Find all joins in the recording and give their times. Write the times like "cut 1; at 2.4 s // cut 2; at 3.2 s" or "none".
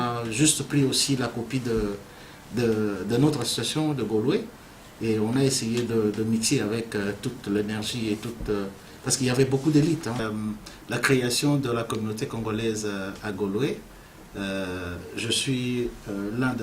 cut 1; at 10.2 s